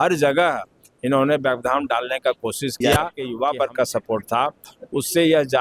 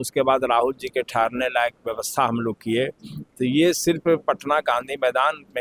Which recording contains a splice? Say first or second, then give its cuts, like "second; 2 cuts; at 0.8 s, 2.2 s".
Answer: first; 1 cut; at 3.2 s